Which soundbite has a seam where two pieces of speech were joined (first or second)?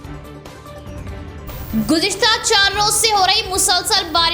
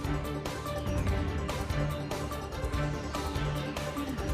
second